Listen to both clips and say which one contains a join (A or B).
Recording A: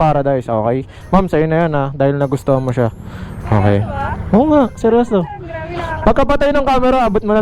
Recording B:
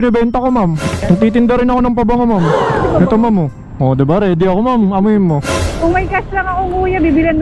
B